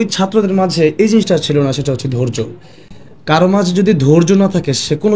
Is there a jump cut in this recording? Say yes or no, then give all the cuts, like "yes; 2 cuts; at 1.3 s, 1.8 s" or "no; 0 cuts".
no; 0 cuts